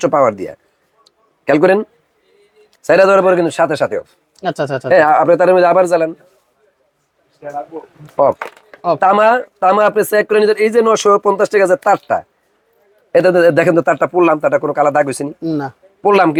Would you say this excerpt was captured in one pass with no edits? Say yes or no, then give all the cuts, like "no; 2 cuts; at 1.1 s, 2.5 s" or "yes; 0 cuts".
yes; 0 cuts